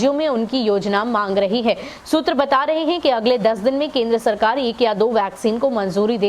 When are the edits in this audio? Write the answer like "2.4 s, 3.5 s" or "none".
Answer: none